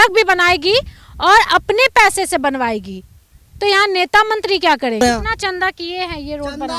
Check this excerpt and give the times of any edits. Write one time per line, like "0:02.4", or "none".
0:05.0

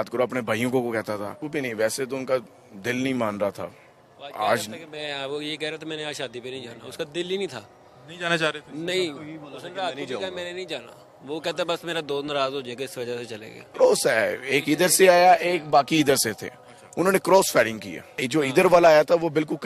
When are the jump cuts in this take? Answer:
0:01.4
0:13.6
0:18.2

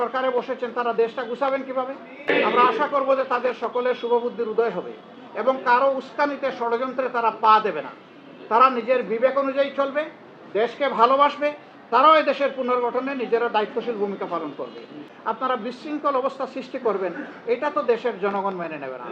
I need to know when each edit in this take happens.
0:02.3
0:15.0

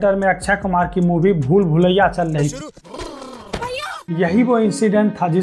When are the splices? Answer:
0:02.7
0:04.0

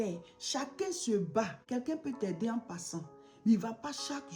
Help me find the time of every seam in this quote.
0:01.6

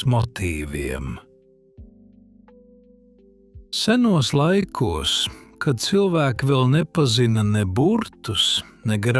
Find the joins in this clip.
0:01.2
0:03.8

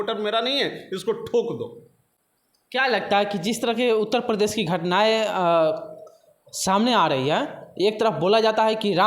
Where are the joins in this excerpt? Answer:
none

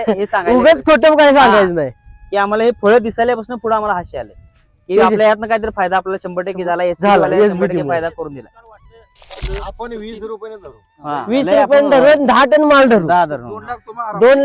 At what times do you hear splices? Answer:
0:09.3

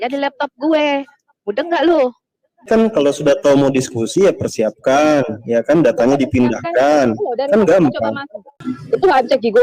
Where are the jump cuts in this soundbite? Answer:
0:02.7
0:08.5

